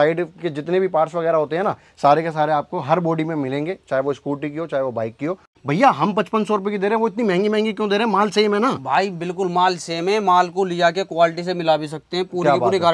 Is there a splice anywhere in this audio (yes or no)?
yes